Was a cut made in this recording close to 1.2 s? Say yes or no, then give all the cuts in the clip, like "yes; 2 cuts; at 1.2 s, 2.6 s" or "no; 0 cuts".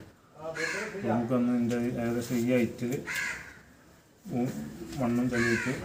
no; 0 cuts